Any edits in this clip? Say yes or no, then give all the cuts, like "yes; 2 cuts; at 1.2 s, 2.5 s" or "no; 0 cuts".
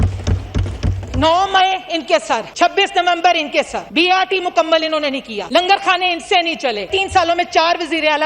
yes; 4 cuts; at 2.5 s, 3.8 s, 5.3 s, 6.9 s